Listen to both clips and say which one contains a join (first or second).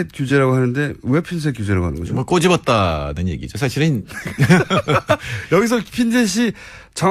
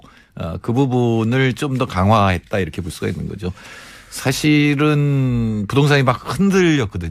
first